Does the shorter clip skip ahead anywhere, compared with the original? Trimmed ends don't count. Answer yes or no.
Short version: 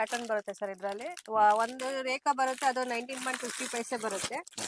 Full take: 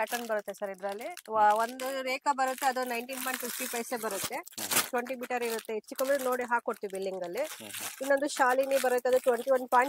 no